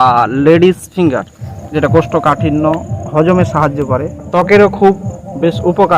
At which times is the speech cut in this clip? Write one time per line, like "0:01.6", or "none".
0:01.5
0:04.2